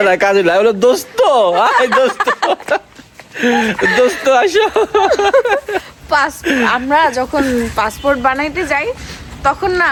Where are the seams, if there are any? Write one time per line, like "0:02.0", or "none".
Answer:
none